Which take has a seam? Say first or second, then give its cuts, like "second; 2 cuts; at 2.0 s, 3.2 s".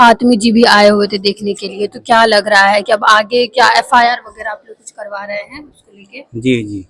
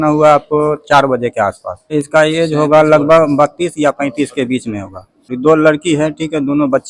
second; 2 cuts; at 1.9 s, 5.3 s